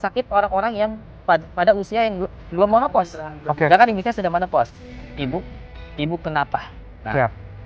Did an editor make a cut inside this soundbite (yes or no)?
yes